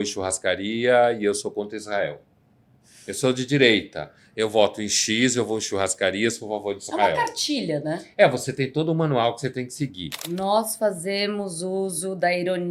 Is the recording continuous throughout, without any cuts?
no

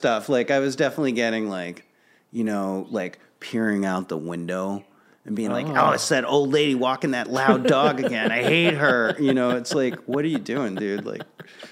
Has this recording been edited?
no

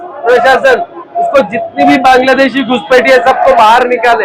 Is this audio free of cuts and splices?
yes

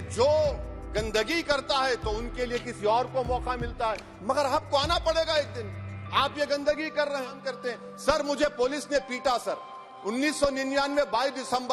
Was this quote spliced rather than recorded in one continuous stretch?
yes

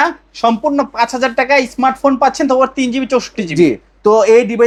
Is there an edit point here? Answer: no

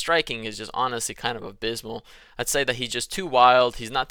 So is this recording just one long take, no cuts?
yes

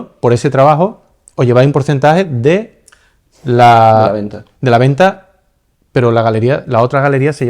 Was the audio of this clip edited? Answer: no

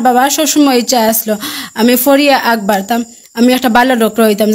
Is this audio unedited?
yes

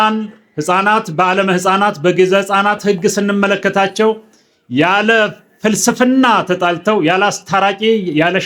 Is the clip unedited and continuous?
yes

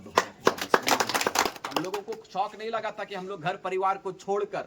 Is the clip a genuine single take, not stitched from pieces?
no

